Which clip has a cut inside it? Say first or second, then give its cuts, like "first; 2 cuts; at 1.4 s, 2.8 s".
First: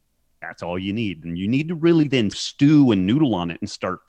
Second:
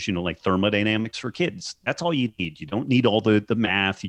first; 1 cut; at 2.4 s